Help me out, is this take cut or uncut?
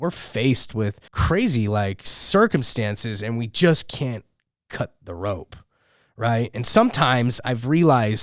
cut